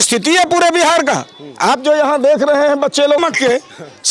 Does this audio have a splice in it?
yes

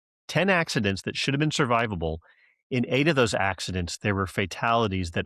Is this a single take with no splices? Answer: yes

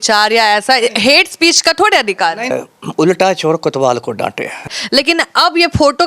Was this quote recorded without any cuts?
no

